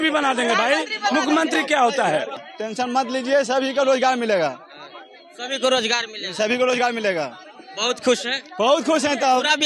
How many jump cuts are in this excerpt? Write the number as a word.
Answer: one